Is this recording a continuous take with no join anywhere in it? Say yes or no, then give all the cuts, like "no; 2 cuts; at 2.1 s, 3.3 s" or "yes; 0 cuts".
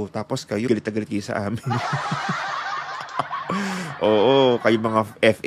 yes; 0 cuts